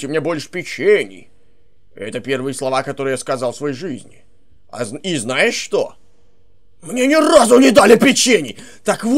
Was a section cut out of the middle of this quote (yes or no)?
no